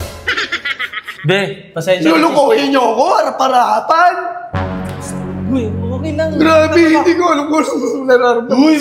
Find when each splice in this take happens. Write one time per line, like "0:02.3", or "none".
none